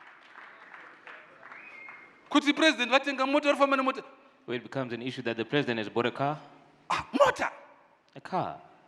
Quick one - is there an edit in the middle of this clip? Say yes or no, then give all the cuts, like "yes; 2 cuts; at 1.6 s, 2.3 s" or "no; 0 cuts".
no; 0 cuts